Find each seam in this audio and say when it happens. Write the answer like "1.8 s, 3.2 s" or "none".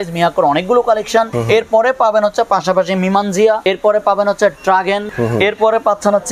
1.4 s, 3.6 s, 5.1 s